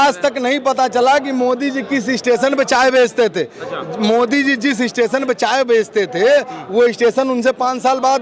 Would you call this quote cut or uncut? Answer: uncut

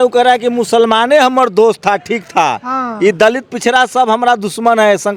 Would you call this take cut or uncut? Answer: uncut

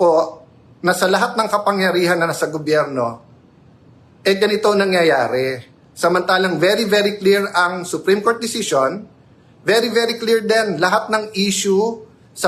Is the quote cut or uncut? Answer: uncut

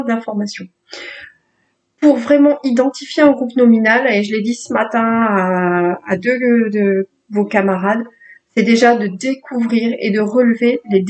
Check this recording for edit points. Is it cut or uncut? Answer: uncut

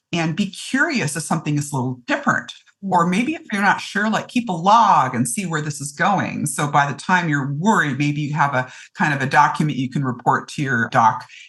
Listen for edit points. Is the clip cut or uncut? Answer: uncut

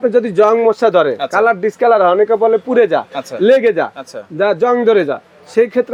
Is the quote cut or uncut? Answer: uncut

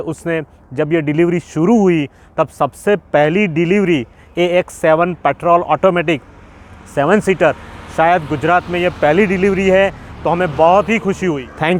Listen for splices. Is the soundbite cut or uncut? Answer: uncut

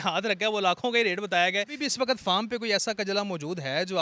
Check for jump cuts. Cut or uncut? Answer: cut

